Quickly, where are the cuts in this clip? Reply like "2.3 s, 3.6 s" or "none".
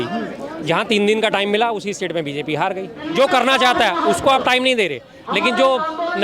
2.9 s